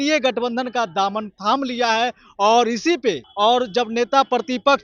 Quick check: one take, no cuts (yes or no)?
yes